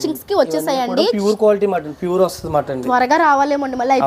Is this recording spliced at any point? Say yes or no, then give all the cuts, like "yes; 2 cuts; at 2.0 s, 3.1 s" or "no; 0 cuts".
no; 0 cuts